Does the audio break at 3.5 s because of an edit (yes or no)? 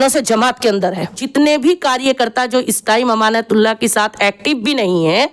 no